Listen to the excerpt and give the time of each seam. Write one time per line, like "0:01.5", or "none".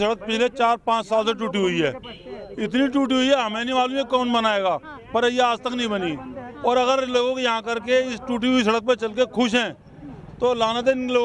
none